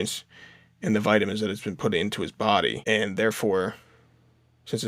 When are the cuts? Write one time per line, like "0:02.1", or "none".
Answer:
0:02.8